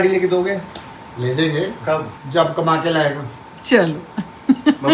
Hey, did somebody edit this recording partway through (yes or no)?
yes